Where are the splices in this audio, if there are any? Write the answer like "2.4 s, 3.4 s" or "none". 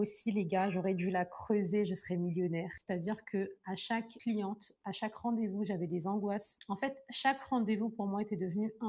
2.7 s, 6.5 s